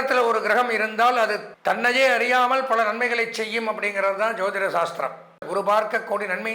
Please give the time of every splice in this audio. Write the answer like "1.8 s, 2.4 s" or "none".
1.5 s, 5.5 s